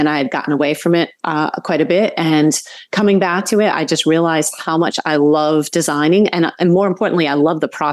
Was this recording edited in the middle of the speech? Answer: no; 0 cuts

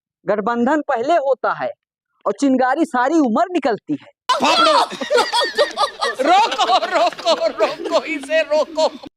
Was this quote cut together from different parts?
no; 0 cuts

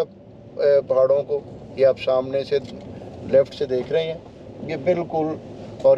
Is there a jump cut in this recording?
no; 0 cuts

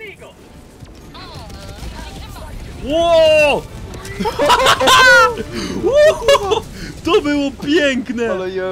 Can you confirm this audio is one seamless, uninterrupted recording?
yes; 0 cuts

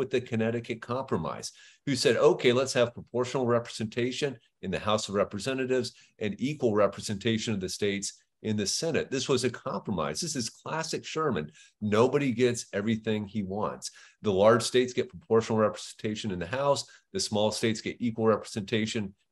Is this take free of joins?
yes; 0 cuts

